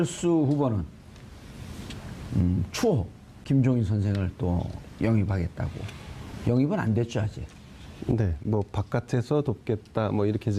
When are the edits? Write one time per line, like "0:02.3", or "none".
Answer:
none